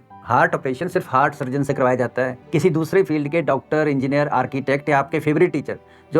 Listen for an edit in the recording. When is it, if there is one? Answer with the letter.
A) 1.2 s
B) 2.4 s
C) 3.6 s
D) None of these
B